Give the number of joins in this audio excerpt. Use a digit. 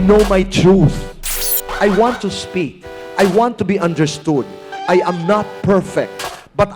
1